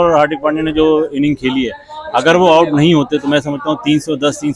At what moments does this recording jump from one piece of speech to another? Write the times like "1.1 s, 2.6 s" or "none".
none

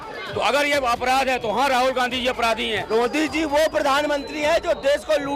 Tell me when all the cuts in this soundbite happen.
2.8 s

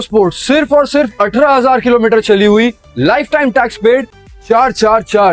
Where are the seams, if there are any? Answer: 4.2 s

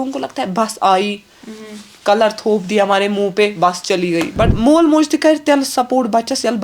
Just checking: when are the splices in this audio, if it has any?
4.5 s

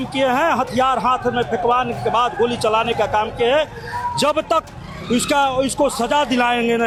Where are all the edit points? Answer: none

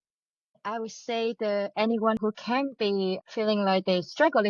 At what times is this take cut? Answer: 2.2 s

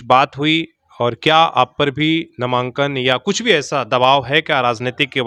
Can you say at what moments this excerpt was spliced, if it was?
none

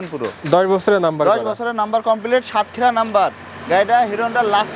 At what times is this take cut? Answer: none

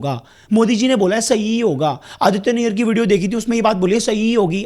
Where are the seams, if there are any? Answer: none

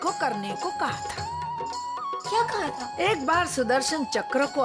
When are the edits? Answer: 2.9 s

